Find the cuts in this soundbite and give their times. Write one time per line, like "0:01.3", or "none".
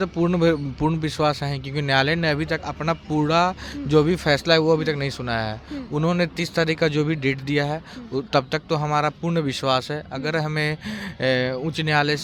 none